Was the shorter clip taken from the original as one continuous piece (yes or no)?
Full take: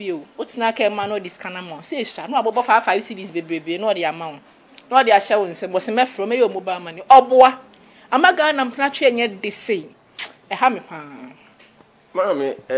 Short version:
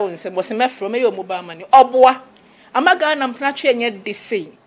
yes